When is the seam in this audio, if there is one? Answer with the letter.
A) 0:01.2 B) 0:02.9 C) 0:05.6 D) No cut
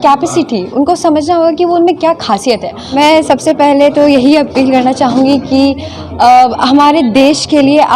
B